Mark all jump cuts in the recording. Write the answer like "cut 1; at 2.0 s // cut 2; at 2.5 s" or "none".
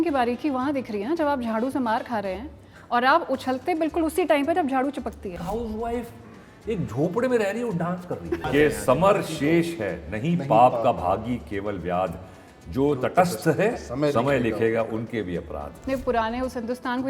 cut 1; at 5.4 s // cut 2; at 8.4 s // cut 3; at 15.7 s

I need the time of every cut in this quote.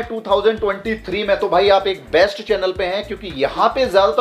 none

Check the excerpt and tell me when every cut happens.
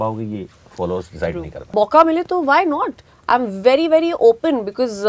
cut 1; at 1.7 s

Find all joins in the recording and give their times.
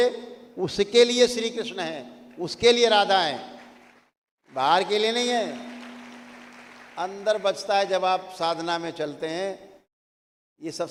none

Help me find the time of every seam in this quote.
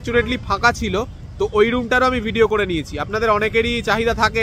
none

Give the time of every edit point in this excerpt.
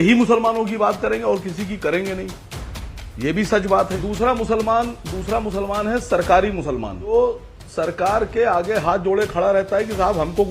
cut 1; at 3.9 s // cut 2; at 7.1 s

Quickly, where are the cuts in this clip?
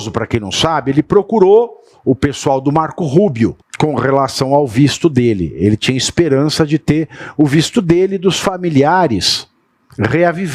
cut 1; at 3.6 s

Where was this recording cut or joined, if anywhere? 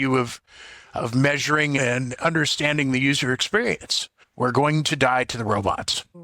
cut 1; at 1.8 s

